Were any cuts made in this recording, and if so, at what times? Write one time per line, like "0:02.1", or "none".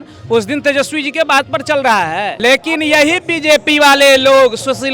0:02.3